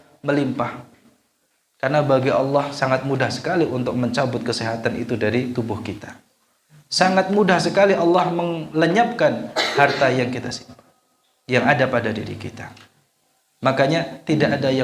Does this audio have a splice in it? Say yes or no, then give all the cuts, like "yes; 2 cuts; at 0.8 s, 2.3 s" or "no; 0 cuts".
no; 0 cuts